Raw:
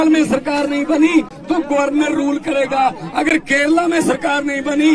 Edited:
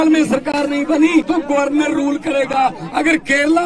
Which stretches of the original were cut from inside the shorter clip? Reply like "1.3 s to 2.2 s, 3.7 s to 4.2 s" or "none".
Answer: 1.3 s to 1.5 s